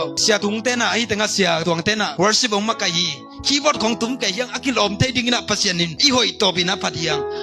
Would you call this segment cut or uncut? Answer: uncut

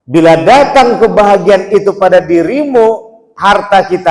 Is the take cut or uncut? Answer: uncut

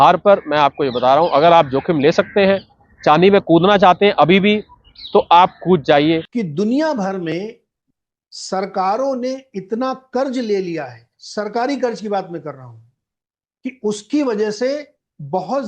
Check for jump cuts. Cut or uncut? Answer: cut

